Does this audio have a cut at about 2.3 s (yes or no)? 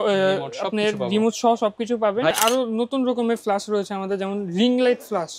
yes